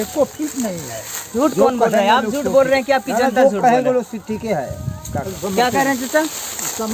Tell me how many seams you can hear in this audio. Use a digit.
2